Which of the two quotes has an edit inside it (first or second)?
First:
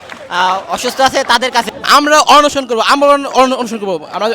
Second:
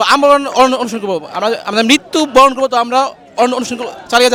first